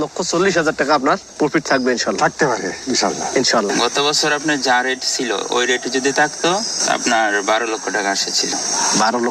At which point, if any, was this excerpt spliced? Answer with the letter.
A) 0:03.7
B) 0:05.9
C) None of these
A